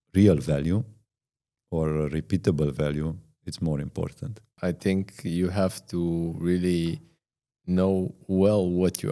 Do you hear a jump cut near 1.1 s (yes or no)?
no